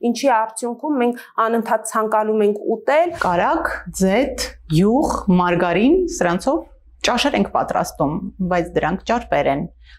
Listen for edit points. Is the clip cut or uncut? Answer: cut